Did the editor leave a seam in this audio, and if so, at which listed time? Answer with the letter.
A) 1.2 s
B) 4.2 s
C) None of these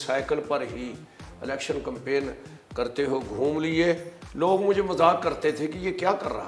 B